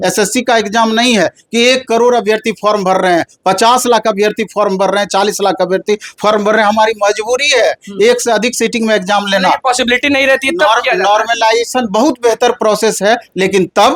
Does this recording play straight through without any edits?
yes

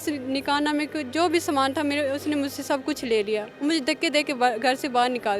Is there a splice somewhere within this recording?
no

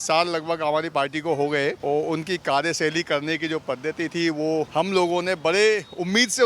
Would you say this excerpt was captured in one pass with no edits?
no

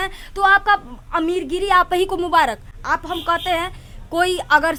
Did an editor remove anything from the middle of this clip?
no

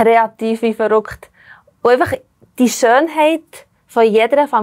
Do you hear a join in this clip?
no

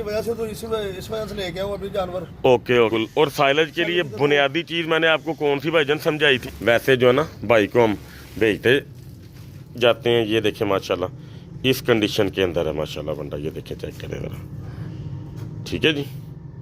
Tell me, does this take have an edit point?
yes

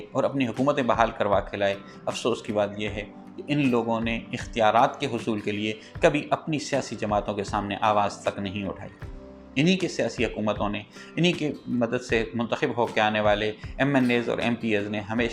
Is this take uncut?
yes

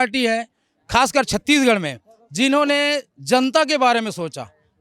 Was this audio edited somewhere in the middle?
no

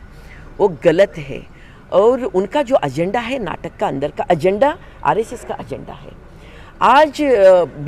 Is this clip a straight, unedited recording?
yes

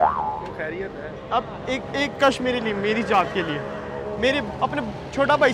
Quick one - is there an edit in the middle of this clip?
no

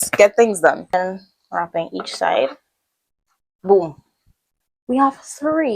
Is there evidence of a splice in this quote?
yes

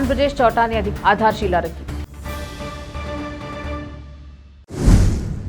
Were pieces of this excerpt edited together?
yes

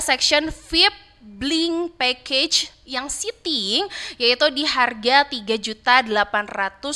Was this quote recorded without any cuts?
yes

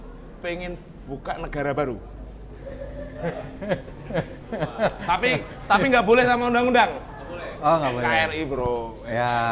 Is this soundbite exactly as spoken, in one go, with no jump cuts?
yes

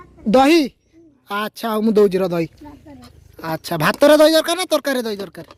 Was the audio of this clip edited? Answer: no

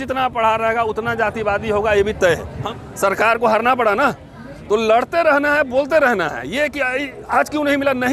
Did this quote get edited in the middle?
yes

